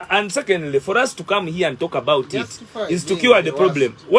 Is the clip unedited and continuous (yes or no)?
yes